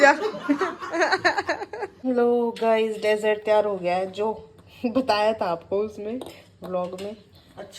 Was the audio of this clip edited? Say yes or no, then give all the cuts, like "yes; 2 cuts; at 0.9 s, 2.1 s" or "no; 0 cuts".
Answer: yes; 1 cut; at 2.0 s